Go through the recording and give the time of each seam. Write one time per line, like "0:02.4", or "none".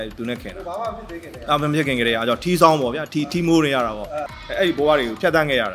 0:04.2